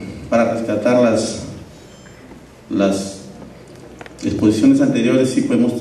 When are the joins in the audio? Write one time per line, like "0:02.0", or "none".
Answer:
0:03.4